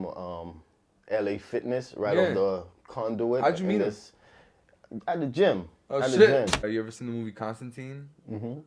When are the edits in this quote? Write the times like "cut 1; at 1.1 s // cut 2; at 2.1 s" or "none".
cut 1; at 6.6 s